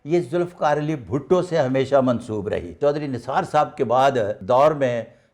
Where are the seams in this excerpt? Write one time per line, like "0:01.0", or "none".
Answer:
0:02.7
0:04.4